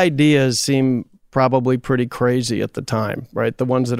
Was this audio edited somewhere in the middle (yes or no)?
no